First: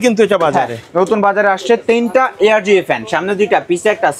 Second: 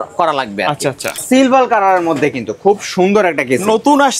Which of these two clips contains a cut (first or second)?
second